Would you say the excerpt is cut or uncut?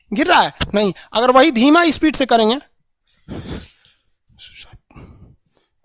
uncut